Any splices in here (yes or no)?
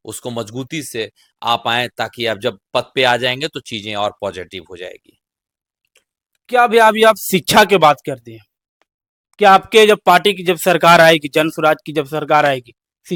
no